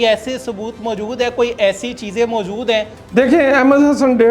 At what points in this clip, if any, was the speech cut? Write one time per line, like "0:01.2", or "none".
0:03.0